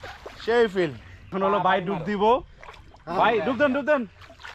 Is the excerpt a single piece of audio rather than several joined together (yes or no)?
no